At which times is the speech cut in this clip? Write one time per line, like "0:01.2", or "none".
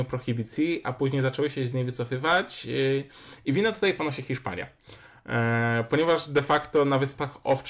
none